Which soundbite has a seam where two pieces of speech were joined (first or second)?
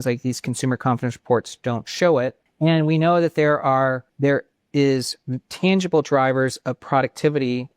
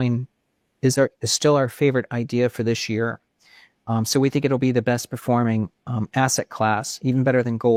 first